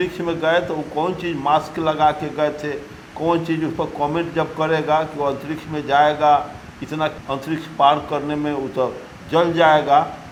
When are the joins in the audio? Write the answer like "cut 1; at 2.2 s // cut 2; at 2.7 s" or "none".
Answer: none